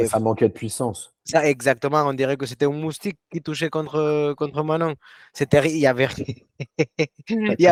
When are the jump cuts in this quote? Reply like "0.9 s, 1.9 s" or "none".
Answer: none